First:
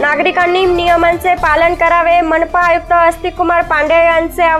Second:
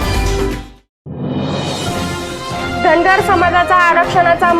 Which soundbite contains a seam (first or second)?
second